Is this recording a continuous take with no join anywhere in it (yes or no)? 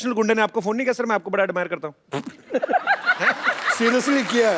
no